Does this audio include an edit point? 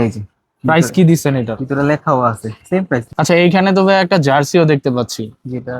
yes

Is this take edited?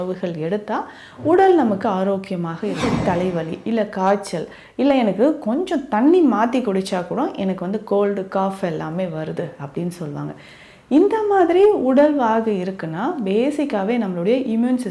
yes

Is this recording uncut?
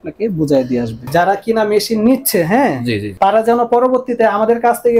no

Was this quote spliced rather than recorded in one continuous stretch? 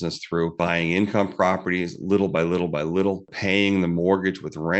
no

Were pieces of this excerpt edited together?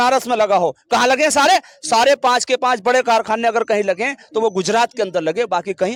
no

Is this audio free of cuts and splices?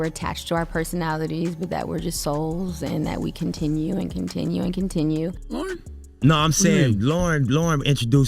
no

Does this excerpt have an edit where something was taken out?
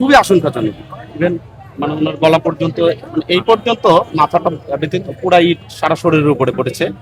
no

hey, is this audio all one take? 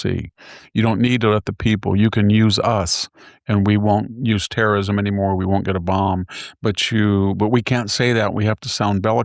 yes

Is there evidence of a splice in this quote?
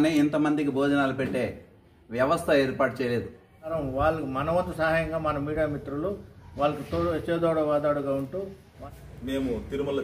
yes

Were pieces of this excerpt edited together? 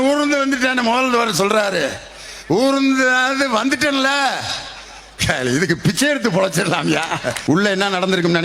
yes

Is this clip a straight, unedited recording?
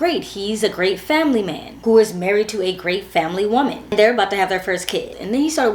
yes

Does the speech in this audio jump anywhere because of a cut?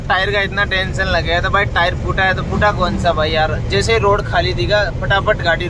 no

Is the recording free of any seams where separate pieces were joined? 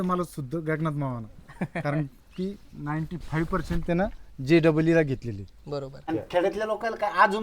no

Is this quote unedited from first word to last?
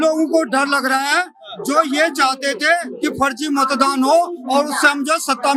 yes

